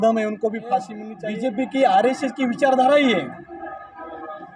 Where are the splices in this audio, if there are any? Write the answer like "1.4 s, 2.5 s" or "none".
1.0 s